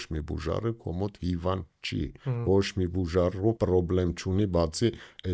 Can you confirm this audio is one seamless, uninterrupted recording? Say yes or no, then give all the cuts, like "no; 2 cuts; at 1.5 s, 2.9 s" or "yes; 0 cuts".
no; 2 cuts; at 2.2 s, 3.6 s